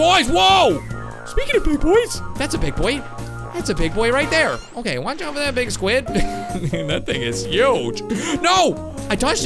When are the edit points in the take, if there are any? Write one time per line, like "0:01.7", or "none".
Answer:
none